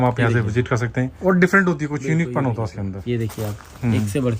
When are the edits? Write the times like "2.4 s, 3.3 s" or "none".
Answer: 1.1 s, 3.0 s